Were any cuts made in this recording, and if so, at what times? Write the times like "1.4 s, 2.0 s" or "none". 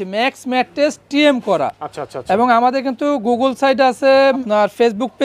none